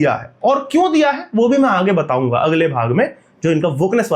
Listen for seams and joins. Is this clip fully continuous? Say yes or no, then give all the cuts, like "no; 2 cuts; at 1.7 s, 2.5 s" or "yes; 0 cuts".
yes; 0 cuts